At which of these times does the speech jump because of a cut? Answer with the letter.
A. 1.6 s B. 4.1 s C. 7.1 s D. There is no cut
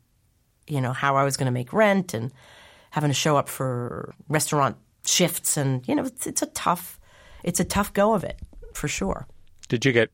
B